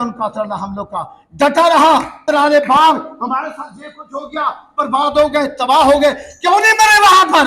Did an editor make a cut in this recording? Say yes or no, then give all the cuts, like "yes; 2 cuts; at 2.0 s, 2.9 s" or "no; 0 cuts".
yes; 1 cut; at 2.2 s